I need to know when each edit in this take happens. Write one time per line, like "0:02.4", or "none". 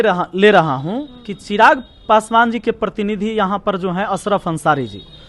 none